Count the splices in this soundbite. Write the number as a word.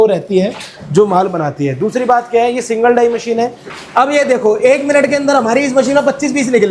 one